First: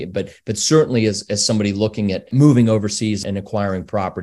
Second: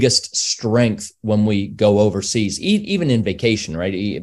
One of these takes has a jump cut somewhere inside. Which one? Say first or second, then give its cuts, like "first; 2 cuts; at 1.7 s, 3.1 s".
first; 2 cuts; at 2.3 s, 3.2 s